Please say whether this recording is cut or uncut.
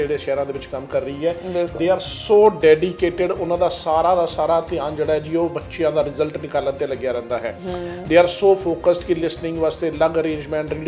uncut